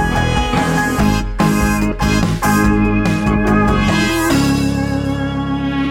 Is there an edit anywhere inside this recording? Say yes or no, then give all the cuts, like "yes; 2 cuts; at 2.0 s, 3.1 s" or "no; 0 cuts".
no; 0 cuts